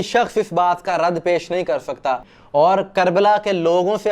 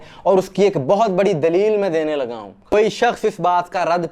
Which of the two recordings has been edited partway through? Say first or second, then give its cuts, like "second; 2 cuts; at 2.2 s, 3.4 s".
first; 1 cut; at 2.3 s